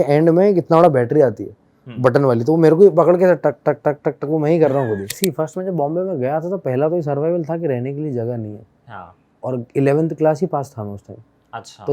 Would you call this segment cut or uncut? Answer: cut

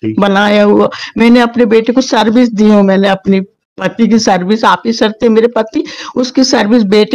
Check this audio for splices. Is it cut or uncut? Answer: uncut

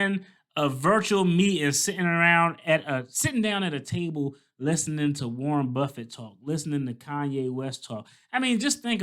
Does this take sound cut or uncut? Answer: uncut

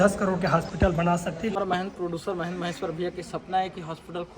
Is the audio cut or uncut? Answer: cut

